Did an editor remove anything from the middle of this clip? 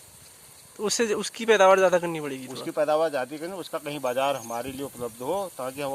no; 0 cuts

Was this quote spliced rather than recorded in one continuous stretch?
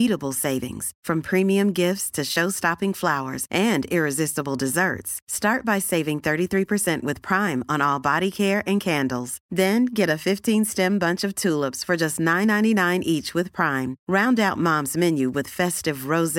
no; 0 cuts

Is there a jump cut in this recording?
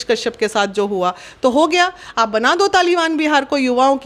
no; 0 cuts

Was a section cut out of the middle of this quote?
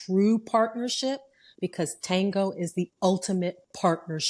no; 0 cuts

